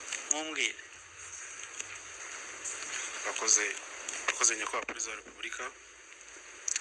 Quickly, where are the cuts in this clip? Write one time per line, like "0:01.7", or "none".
0:02.2